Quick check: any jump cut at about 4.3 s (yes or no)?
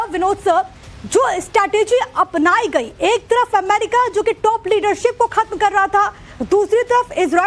no